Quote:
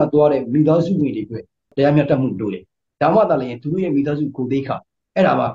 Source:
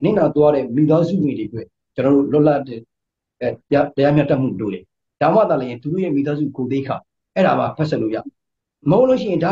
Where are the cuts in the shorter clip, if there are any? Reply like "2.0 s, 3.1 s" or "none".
1.7 s